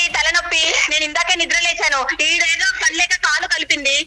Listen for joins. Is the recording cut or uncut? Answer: uncut